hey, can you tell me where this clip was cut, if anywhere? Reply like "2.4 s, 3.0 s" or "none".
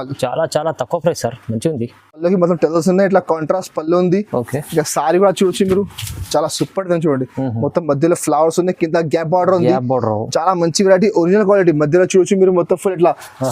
2.2 s